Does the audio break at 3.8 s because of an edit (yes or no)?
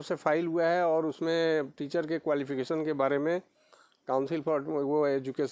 no